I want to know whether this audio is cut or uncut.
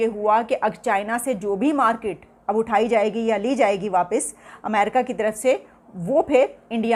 uncut